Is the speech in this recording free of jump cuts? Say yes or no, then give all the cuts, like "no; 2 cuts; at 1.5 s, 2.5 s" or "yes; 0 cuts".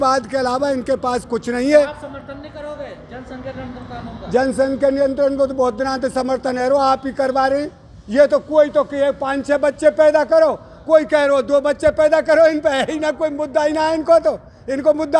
yes; 0 cuts